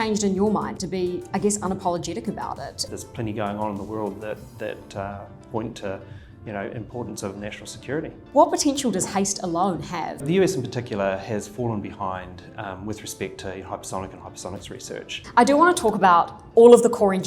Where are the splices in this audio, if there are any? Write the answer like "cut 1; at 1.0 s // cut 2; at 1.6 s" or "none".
cut 1; at 2.8 s // cut 2; at 8.2 s // cut 3; at 10.2 s // cut 4; at 15.2 s